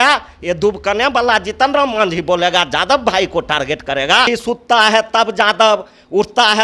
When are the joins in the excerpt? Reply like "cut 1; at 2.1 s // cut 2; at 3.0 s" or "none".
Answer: cut 1; at 4.3 s